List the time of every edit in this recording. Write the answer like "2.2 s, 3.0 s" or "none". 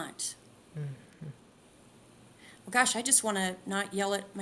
none